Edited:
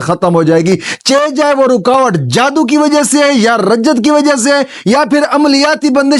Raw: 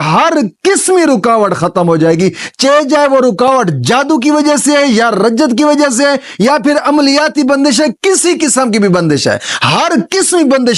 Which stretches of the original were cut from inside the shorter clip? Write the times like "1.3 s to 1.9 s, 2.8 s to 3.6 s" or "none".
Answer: none